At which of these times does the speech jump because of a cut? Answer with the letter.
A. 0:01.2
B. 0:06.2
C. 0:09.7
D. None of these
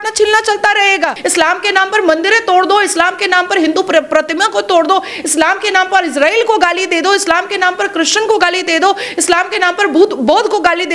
A